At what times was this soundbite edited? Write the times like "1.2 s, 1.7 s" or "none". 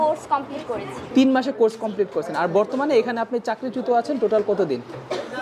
none